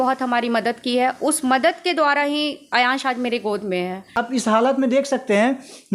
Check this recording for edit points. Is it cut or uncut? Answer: cut